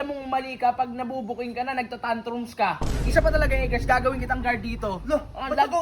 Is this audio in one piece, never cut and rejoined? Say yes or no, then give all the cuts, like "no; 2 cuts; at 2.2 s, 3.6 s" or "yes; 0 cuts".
no; 1 cut; at 2.9 s